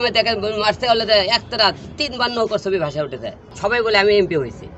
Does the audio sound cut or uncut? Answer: cut